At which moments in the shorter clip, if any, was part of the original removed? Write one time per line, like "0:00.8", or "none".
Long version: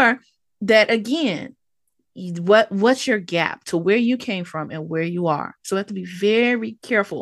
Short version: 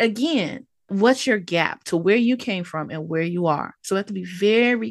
0:00.9